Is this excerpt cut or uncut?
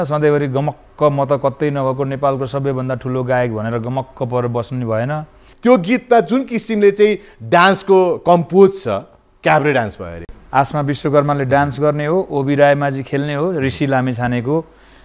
cut